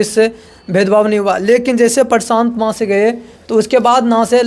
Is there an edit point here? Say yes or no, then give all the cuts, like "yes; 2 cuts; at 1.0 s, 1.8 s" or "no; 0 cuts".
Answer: no; 0 cuts